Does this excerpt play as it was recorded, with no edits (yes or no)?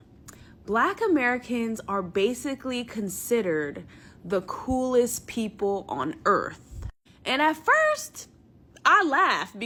yes